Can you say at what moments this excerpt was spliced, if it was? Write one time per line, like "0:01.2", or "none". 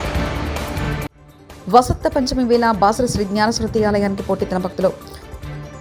none